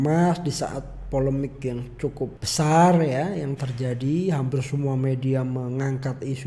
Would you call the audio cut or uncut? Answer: cut